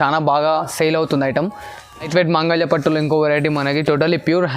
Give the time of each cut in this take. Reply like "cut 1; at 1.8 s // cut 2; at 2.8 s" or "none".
cut 1; at 2.1 s